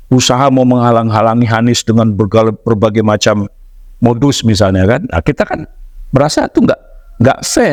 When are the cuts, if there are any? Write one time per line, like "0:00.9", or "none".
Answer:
none

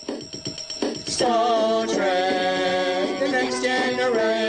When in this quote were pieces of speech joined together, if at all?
0:00.9

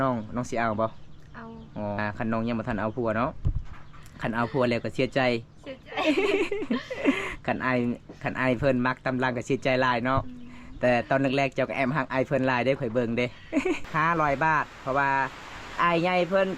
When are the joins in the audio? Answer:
0:02.0
0:13.8

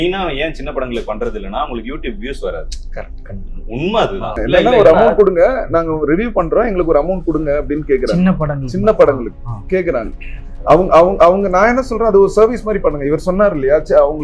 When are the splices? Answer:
0:04.4

